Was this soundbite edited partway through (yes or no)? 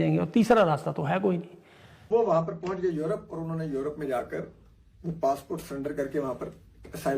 yes